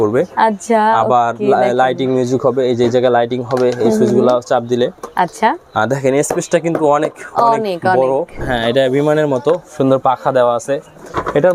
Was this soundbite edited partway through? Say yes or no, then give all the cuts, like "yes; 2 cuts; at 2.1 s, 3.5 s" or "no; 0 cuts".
yes; 1 cut; at 8.4 s